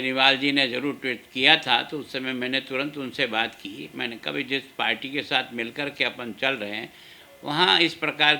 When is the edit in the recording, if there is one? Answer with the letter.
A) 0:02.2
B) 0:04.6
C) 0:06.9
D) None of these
D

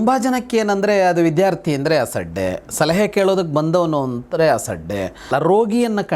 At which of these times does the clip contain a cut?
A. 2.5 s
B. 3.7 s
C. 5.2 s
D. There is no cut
C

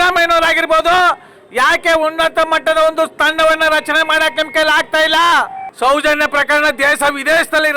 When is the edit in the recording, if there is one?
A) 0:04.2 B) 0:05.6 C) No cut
B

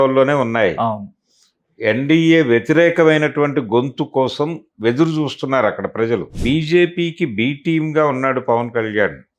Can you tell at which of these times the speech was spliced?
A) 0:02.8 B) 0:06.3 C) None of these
B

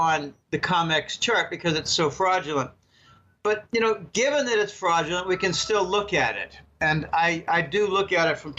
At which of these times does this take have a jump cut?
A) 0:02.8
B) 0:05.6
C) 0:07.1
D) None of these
C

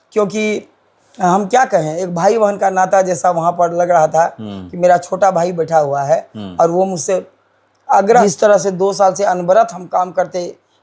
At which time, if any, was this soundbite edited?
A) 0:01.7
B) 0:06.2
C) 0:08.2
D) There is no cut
C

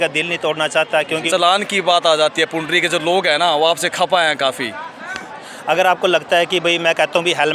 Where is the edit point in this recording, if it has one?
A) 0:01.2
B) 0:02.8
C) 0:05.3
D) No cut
A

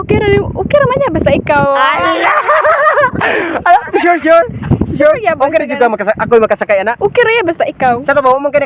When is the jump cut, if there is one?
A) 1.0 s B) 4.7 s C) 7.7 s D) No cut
D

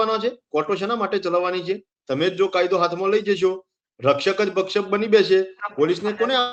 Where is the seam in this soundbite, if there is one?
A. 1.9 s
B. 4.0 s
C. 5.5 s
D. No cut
D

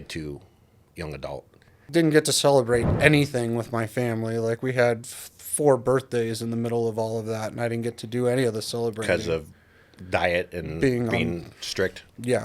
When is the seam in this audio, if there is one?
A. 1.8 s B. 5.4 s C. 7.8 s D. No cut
A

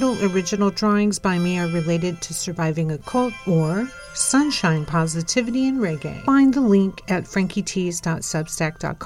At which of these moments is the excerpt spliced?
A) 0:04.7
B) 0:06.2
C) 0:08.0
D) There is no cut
B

